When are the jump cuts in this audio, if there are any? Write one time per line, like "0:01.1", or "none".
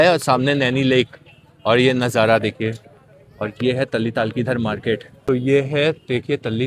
0:05.1